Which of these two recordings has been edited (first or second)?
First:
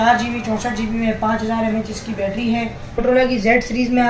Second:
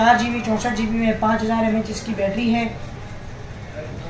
first